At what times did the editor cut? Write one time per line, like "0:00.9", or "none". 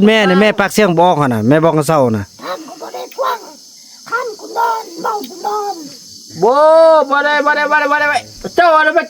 none

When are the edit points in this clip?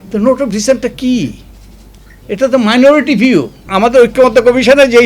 0:03.7

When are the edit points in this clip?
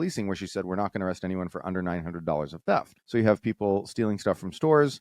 0:03.0

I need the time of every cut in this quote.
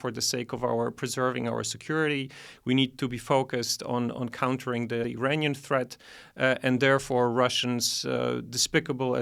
none

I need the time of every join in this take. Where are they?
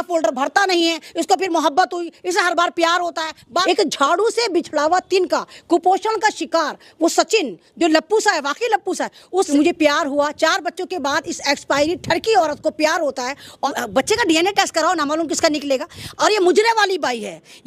0:03.4
0:09.5
0:13.7
0:16.1

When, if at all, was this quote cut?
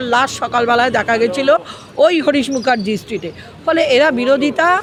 none

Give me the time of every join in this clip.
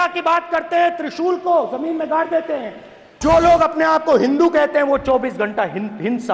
0:03.2

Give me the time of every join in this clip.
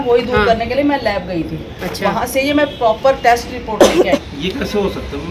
0:04.0

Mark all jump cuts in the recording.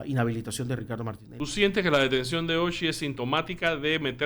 0:01.2

